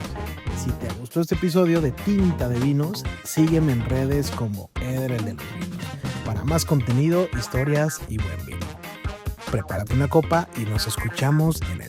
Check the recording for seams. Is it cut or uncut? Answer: cut